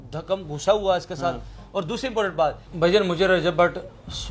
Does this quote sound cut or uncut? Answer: cut